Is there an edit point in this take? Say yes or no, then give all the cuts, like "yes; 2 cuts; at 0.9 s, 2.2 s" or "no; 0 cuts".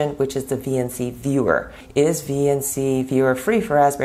yes; 1 cut; at 1.7 s